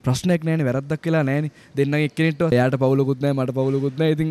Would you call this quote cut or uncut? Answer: cut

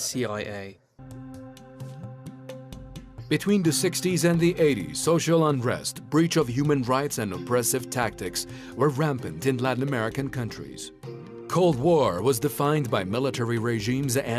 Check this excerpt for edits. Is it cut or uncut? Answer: cut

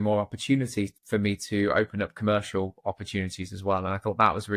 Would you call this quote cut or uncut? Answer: uncut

